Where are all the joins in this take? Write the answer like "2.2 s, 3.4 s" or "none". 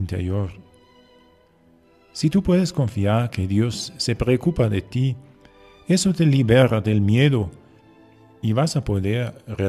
none